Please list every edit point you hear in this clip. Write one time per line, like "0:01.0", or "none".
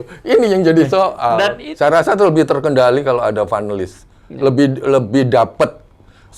0:01.6